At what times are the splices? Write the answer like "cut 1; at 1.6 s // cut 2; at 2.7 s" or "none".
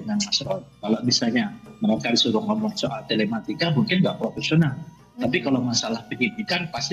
none